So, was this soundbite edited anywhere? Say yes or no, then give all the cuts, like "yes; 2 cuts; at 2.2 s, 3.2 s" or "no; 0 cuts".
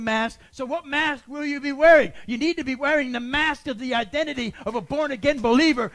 no; 0 cuts